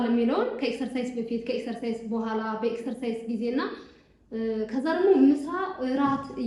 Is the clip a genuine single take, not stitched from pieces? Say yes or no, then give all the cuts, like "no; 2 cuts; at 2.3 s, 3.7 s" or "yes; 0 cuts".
yes; 0 cuts